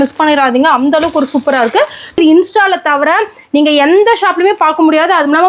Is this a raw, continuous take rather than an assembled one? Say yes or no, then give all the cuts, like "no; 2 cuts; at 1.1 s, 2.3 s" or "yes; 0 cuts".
no; 1 cut; at 2.2 s